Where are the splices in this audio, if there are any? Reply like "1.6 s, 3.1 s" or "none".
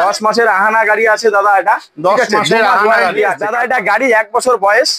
3.4 s